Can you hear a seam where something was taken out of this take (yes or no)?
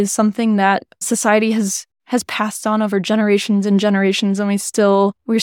no